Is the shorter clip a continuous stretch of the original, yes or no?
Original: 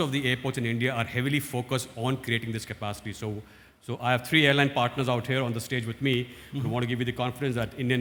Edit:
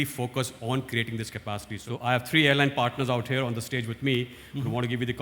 no